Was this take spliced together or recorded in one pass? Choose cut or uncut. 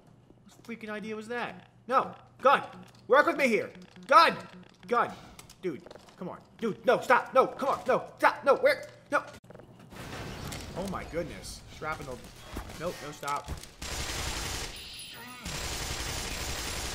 uncut